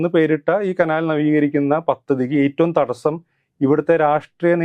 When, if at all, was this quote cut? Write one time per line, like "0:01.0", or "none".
none

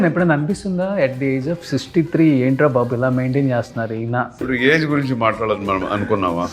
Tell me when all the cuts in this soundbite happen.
0:04.4

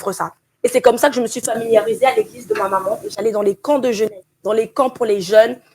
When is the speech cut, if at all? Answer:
0:04.3

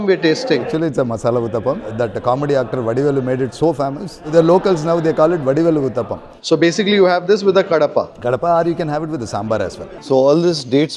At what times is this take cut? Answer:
0:09.9

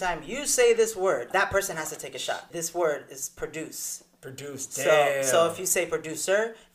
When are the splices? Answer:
0:01.3
0:02.5

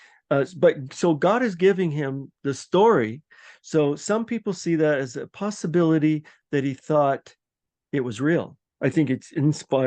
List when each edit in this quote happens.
0:08.6

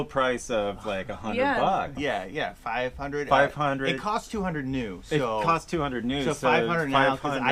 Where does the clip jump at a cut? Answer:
0:01.9

